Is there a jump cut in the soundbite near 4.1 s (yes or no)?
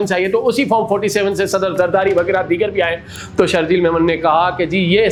no